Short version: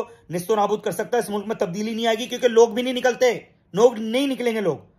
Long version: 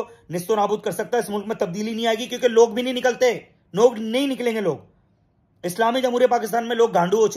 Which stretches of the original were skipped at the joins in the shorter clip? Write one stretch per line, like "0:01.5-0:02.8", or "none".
none